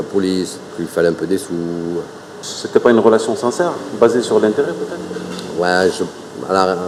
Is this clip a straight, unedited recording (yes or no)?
yes